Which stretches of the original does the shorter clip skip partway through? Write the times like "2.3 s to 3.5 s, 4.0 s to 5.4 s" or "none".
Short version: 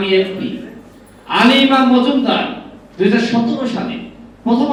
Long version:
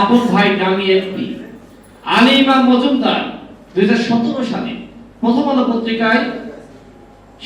none